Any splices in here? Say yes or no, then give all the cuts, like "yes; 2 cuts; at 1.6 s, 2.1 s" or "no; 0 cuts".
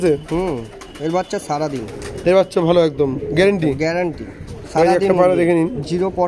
no; 0 cuts